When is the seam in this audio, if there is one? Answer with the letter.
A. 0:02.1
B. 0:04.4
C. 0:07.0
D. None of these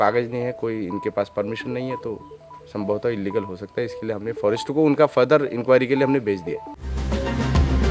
C